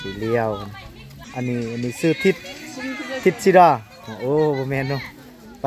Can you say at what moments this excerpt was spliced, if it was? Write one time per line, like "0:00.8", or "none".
0:01.2